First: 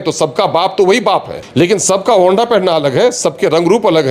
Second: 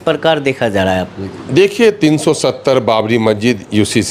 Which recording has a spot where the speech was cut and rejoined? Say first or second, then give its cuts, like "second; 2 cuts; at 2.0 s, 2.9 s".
first; 1 cut; at 1.4 s